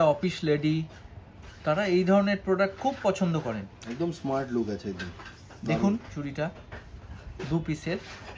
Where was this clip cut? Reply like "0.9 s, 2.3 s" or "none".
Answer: none